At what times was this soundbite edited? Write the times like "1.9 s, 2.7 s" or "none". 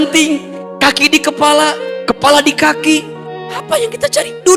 none